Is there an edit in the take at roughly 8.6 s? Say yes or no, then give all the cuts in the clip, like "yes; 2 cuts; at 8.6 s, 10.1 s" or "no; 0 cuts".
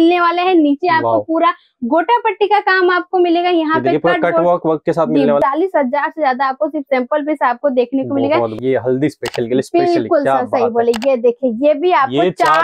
yes; 2 cuts; at 5.4 s, 8.6 s